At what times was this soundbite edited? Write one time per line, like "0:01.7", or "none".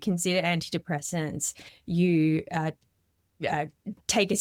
none